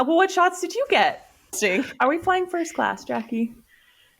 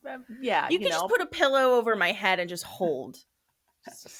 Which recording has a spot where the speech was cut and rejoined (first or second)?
first